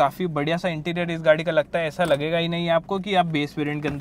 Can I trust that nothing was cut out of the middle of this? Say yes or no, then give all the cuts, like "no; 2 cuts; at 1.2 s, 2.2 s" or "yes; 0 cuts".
yes; 0 cuts